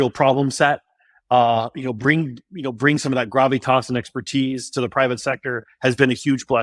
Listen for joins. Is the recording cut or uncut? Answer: uncut